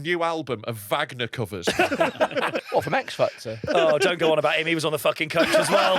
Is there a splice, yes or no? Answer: yes